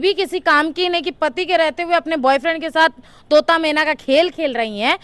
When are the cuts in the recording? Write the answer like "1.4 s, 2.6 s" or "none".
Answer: none